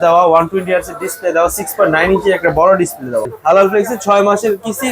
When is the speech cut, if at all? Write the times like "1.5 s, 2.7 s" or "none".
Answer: 3.3 s